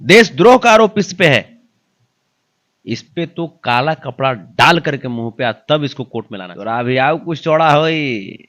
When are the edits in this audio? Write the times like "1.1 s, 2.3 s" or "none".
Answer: 6.4 s